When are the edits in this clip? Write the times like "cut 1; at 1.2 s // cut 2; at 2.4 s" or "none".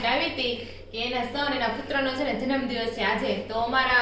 none